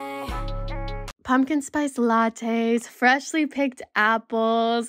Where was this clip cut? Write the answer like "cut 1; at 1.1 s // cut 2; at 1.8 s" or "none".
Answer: cut 1; at 1.1 s